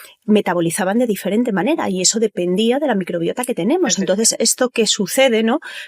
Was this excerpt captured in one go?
yes; 0 cuts

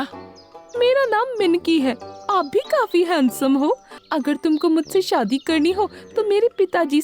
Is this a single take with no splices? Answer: no; 1 cut; at 4.0 s

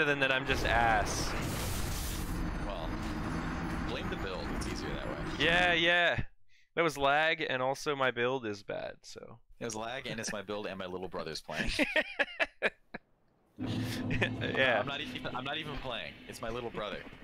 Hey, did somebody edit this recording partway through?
no; 0 cuts

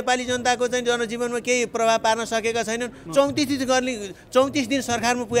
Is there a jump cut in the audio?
no; 0 cuts

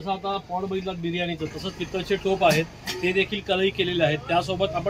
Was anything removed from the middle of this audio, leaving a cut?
no; 0 cuts

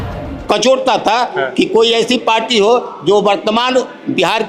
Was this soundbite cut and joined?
no; 0 cuts

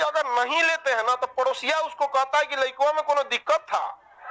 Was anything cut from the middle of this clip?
no; 0 cuts

